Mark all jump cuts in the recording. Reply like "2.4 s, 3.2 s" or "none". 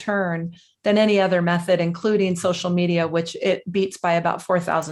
none